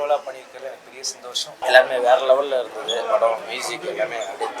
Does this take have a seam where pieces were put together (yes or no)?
yes